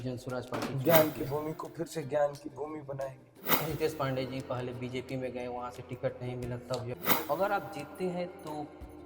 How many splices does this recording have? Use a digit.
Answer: 3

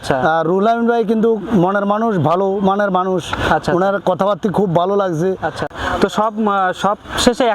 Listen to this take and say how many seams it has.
1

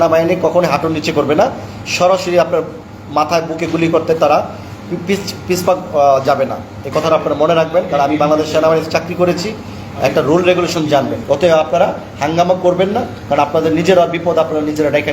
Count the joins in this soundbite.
1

